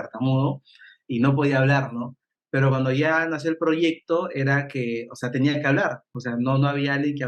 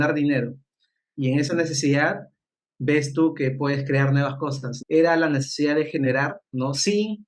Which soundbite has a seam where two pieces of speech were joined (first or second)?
second